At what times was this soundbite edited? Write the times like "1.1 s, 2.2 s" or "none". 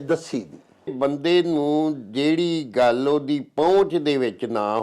0.9 s